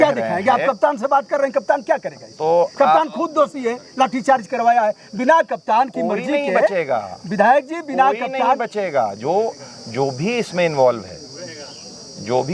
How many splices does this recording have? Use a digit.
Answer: 0